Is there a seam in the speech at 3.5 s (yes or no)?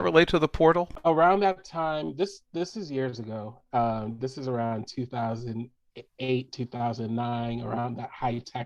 no